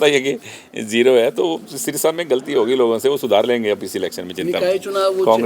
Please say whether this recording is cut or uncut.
uncut